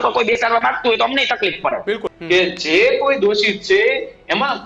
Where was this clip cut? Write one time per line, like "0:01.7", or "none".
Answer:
0:02.1